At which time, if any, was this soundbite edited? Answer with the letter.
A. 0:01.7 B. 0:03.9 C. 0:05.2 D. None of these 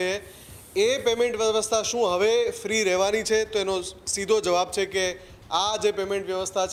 D